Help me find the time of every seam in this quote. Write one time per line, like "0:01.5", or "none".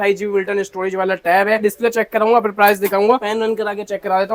none